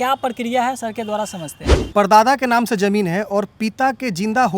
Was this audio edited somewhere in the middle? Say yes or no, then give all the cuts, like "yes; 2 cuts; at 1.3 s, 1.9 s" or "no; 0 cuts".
yes; 1 cut; at 1.9 s